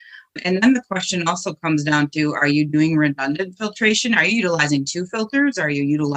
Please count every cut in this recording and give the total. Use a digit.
0